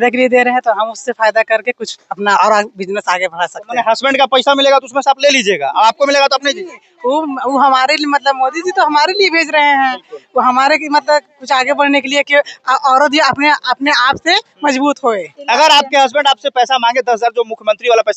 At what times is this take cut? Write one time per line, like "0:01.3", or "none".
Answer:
0:15.3